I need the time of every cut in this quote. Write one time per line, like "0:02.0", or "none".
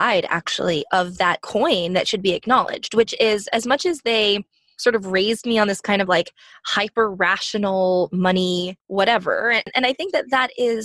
0:01.4
0:08.8
0:09.7